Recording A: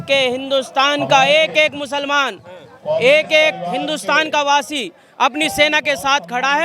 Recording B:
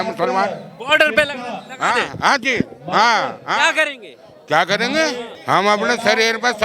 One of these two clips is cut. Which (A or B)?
B